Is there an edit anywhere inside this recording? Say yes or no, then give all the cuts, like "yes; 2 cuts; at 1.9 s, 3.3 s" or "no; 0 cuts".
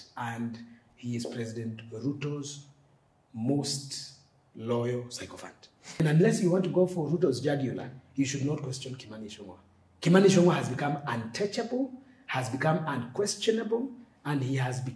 yes; 1 cut; at 6.0 s